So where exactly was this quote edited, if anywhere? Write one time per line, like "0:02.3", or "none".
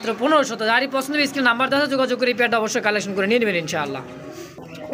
none